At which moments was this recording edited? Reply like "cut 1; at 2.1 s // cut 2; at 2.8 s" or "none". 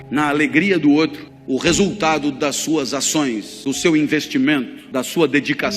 cut 1; at 1.3 s // cut 2; at 3.5 s // cut 3; at 4.8 s